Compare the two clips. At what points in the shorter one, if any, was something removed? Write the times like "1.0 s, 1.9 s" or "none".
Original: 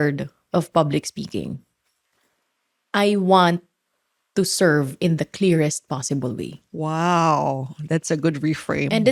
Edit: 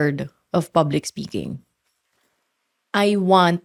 none